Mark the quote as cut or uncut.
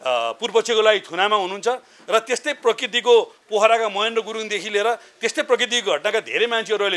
uncut